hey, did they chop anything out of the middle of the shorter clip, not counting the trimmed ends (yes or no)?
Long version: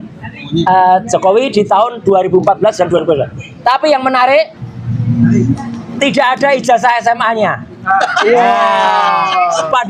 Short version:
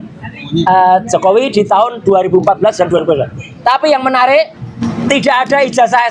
yes